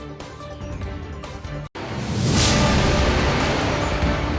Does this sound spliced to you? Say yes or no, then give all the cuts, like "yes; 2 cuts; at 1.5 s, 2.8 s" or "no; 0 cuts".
no; 0 cuts